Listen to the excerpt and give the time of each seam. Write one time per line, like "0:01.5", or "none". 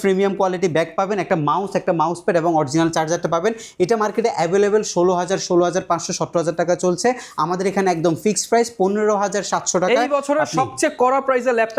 none